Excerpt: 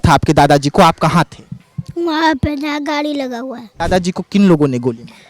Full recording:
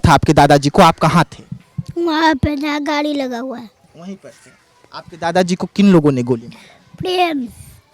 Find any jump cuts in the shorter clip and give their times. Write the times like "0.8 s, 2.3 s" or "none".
3.7 s